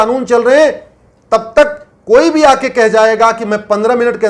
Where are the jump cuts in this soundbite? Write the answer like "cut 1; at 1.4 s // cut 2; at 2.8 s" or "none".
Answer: none